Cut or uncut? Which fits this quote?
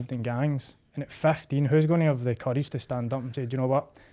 uncut